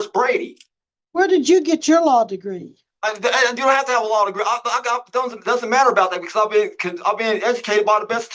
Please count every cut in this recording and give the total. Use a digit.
0